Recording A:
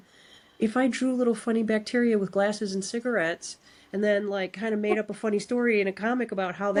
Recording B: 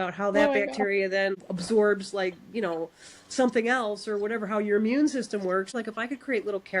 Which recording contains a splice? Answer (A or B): B